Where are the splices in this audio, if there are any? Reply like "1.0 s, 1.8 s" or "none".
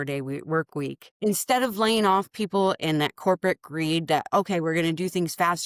none

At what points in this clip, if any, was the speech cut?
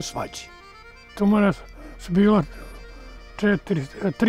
1.2 s

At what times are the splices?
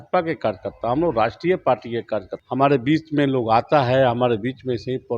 2.4 s

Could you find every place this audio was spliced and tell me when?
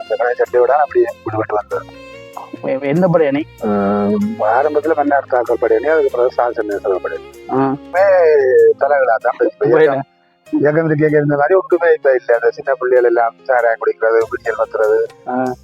7.9 s

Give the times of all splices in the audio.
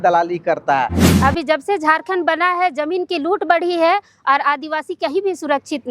1.1 s

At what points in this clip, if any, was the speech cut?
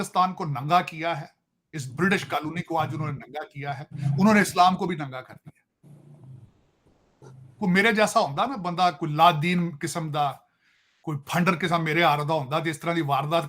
none

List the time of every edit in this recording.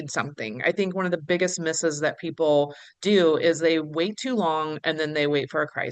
none

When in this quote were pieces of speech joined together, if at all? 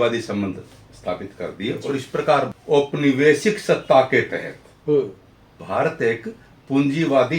2.5 s, 5.6 s

